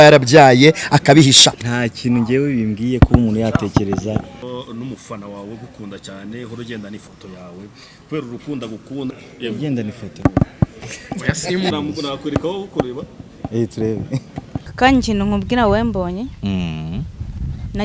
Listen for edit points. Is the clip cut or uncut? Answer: cut